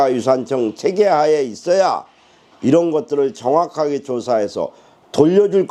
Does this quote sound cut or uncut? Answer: uncut